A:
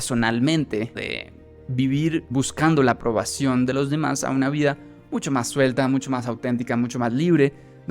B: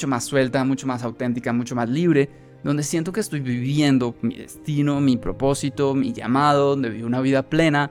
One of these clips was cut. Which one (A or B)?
A